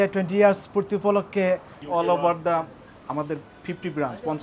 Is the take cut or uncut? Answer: cut